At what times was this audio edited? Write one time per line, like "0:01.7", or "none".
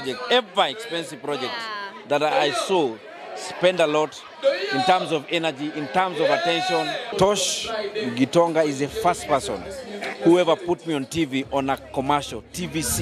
0:07.1